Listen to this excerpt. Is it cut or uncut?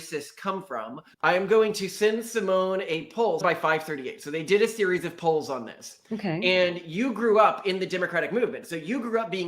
cut